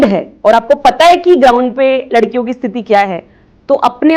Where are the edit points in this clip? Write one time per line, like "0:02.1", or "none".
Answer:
none